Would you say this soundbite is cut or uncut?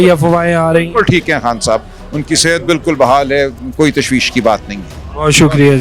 uncut